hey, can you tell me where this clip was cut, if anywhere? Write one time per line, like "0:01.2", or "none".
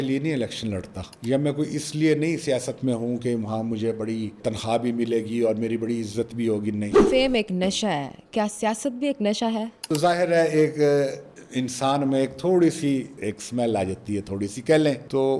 0:07.0
0:09.7